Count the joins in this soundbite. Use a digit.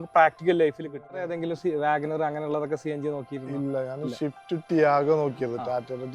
1